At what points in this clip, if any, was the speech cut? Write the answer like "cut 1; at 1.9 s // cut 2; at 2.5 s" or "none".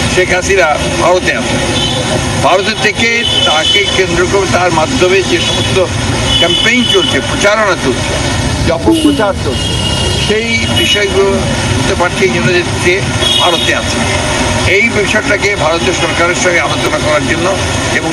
none

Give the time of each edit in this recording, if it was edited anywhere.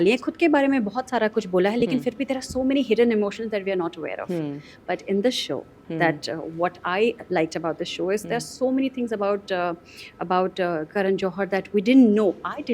none

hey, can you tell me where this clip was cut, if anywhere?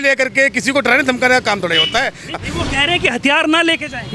cut 1; at 2.3 s

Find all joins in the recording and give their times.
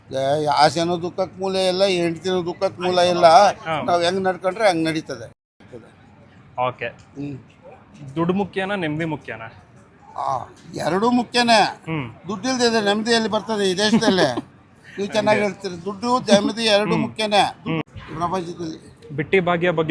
cut 1; at 5.6 s // cut 2; at 17.8 s

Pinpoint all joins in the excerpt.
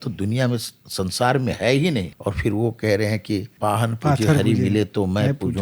cut 1; at 2.1 s // cut 2; at 3.5 s

